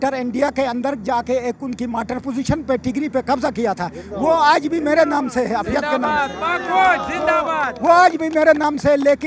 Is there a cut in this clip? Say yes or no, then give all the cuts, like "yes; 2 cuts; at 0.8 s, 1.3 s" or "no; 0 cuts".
no; 0 cuts